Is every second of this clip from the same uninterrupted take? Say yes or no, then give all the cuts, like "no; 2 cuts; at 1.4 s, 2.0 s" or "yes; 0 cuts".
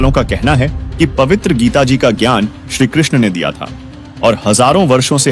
yes; 0 cuts